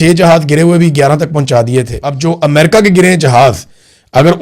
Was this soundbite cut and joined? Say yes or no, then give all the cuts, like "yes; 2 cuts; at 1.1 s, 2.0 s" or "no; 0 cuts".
yes; 1 cut; at 2.0 s